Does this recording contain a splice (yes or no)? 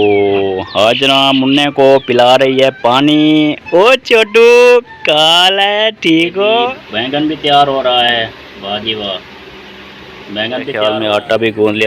yes